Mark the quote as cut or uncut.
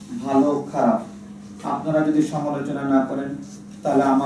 uncut